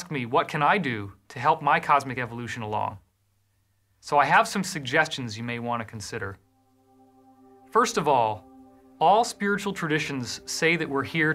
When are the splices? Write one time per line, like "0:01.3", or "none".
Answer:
0:09.3